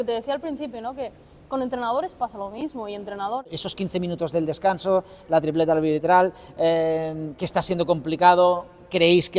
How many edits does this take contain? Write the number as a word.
one